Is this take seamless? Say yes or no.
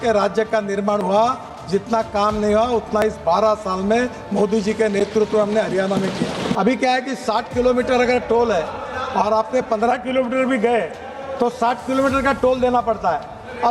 no